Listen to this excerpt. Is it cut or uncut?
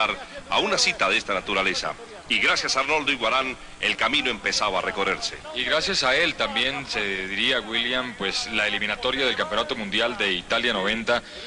uncut